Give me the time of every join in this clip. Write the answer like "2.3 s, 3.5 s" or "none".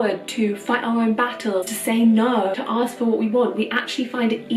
1.7 s, 2.6 s